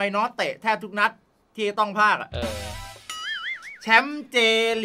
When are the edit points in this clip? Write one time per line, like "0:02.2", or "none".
none